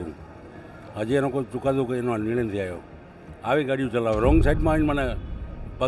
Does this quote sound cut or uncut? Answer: uncut